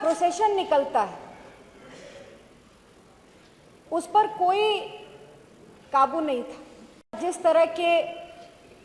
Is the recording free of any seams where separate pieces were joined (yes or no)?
no